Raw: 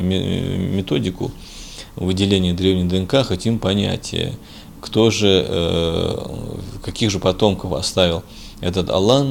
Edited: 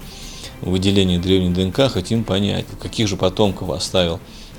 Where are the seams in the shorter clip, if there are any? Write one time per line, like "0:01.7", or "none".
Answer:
0:02.7